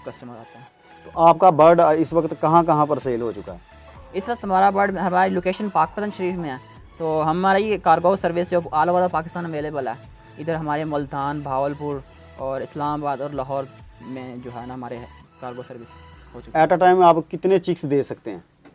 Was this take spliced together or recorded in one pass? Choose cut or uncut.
uncut